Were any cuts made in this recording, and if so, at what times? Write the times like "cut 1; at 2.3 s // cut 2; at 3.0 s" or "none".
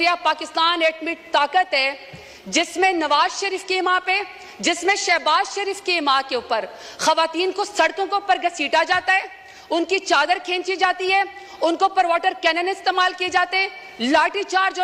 none